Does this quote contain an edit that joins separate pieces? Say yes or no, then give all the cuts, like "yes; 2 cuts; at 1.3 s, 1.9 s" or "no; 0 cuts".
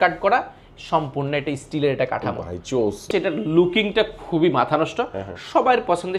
yes; 1 cut; at 3.1 s